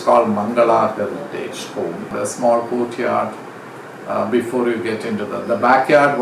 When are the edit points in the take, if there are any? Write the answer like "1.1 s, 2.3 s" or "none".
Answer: 2.1 s